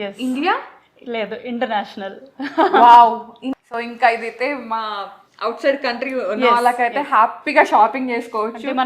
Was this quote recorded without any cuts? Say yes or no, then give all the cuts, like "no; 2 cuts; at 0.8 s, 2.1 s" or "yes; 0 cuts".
no; 1 cut; at 3.4 s